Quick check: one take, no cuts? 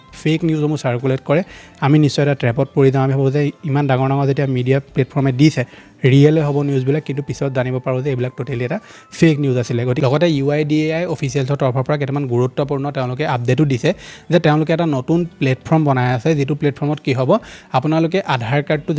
yes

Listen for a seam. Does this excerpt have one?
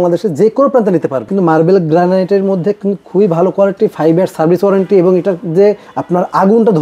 yes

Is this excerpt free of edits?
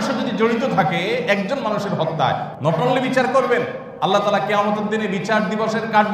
no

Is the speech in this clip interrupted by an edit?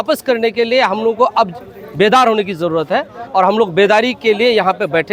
no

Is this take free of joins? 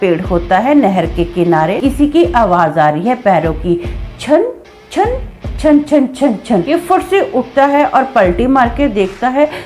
no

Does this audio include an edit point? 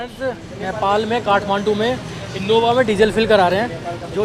no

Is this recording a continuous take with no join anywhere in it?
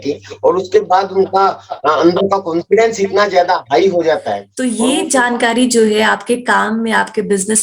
no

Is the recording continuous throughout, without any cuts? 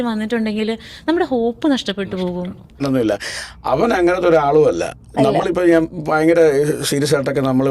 no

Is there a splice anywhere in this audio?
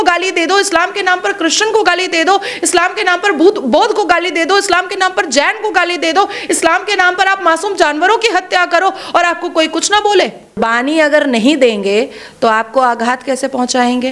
yes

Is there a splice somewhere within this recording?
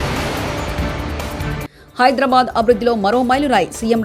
yes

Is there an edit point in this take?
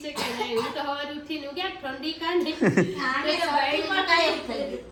no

